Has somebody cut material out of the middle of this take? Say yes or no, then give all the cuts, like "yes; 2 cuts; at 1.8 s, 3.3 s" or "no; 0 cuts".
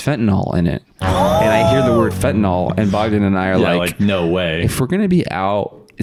no; 0 cuts